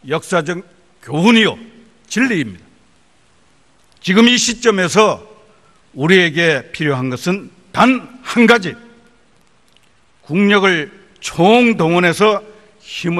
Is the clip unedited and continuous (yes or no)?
no